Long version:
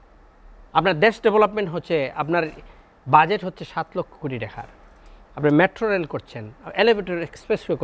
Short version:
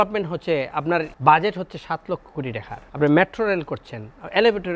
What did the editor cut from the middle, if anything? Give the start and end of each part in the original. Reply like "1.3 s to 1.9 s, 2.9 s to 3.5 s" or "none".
2.5 s to 3.0 s, 4.7 s to 5.2 s